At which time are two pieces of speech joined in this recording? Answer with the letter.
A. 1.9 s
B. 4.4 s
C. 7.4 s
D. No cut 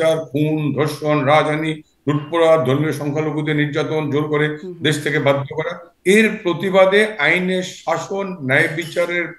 D